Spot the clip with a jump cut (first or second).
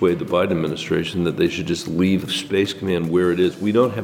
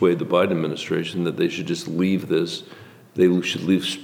first